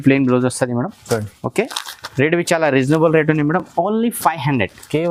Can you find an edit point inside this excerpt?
no; 0 cuts

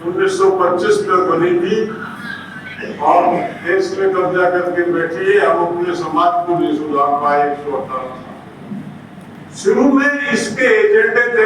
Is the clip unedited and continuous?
no; 1 cut; at 9.4 s

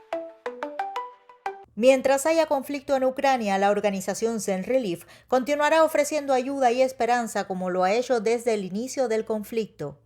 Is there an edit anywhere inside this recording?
yes; 1 cut; at 1.5 s

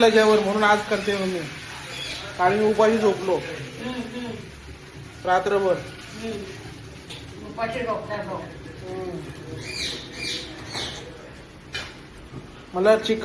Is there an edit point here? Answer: no; 0 cuts

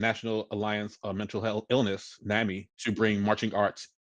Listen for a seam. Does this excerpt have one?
yes; 1 cut; at 2.7 s

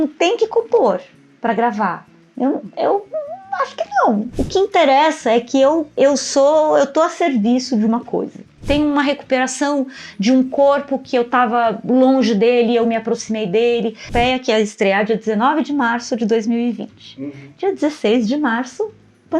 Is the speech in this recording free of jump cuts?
no; 3 cuts; at 4.3 s, 8.5 s, 14.1 s

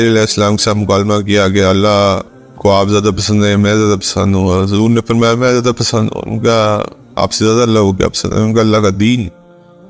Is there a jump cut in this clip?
no; 0 cuts

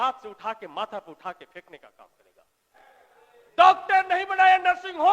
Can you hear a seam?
yes; 1 cut; at 2.8 s

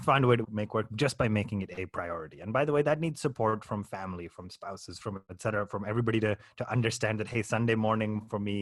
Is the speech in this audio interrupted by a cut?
no; 0 cuts

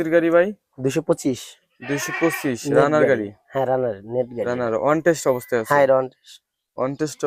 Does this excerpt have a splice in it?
no; 0 cuts

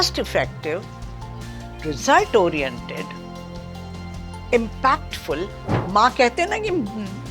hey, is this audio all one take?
no; 1 cut; at 5.9 s

